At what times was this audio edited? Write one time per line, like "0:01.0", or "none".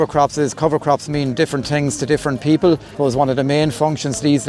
0:02.9